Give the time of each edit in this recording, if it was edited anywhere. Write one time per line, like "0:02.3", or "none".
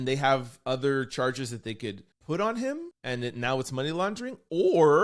0:02.1
0:02.9